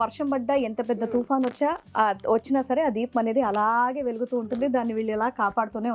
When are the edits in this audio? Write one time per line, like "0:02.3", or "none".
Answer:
none